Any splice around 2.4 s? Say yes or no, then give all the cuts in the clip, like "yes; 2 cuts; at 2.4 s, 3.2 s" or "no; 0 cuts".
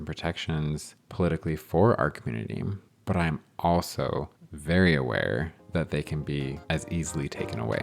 no; 2 cuts; at 5.6 s, 6.6 s